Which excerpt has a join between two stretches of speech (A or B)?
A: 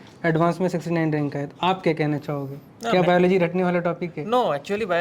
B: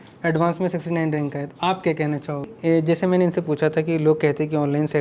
B